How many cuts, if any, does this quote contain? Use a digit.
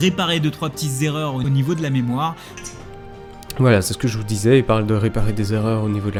0